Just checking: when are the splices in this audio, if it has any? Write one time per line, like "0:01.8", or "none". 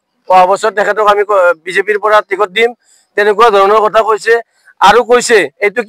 none